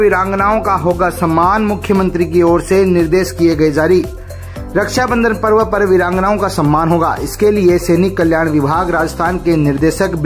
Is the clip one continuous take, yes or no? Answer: yes